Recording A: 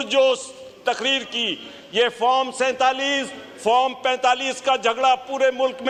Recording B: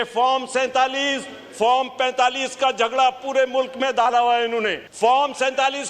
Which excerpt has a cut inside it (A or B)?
B